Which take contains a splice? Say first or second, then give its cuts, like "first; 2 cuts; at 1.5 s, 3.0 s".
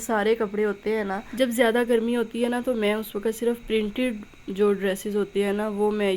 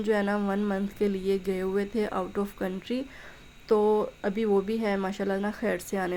first; 1 cut; at 1.3 s